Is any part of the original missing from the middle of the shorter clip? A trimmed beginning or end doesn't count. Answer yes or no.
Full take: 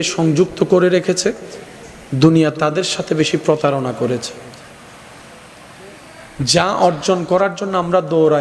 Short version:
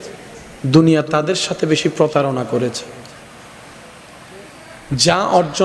no